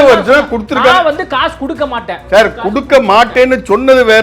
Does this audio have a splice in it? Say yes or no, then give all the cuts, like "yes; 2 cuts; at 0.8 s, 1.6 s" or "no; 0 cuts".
yes; 1 cut; at 2.3 s